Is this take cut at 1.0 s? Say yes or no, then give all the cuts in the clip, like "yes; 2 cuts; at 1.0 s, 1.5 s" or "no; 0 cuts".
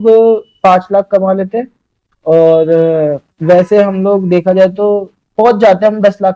no; 0 cuts